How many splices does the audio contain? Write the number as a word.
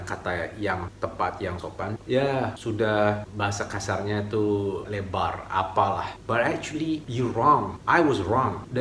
zero